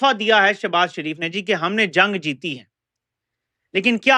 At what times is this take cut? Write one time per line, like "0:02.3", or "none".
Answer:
none